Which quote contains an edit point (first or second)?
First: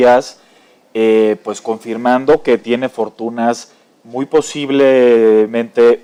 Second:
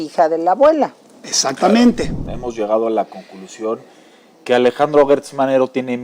second